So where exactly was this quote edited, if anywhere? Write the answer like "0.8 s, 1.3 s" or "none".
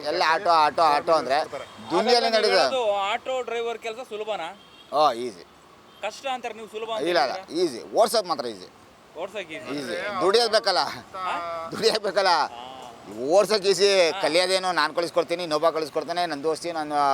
none

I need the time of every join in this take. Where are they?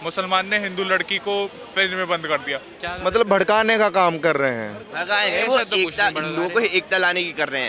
2.7 s

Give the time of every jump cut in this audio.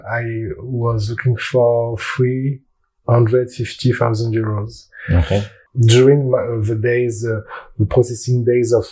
none

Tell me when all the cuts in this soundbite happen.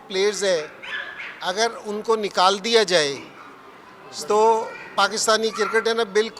none

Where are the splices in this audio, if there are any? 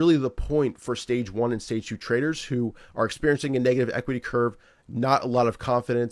none

